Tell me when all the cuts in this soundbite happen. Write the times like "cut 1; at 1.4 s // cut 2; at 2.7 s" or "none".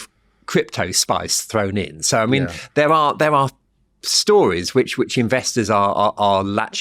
none